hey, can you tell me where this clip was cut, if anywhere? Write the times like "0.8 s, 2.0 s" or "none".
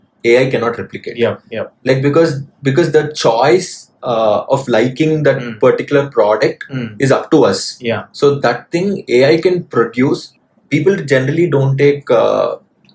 10.3 s

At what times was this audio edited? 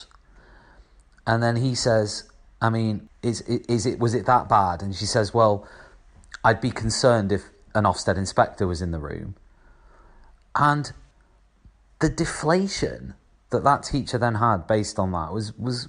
3.1 s

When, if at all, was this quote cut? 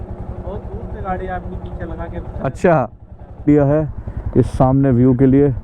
3.4 s

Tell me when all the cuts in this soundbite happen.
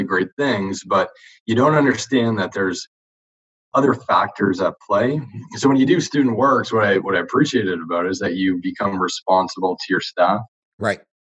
none

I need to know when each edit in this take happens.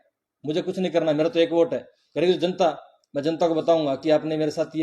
none

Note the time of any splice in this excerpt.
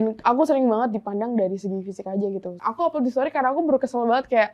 2.6 s

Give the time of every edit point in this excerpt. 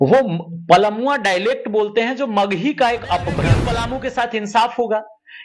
3.6 s

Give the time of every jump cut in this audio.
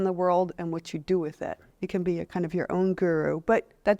1.7 s

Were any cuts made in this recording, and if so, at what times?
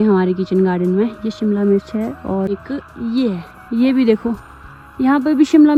none

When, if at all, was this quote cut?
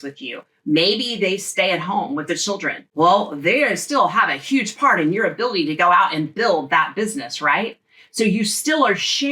2.8 s

